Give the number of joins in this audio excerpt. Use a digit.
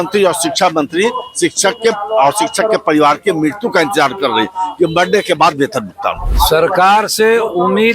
1